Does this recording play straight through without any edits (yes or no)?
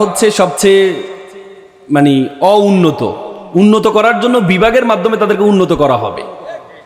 yes